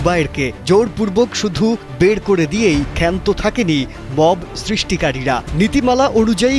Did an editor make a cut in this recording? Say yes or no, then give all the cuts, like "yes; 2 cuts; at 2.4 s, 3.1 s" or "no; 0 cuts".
no; 0 cuts